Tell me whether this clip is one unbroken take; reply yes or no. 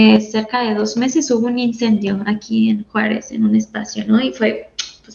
yes